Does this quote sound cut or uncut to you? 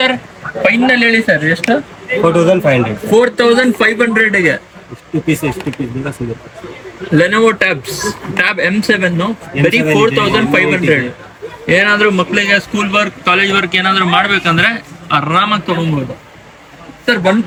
uncut